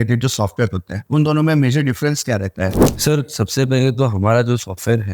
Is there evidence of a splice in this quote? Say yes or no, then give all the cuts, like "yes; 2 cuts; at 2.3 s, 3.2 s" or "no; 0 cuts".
yes; 2 cuts; at 0.9 s, 2.9 s